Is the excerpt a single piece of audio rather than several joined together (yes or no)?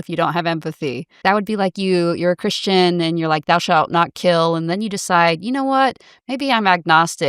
no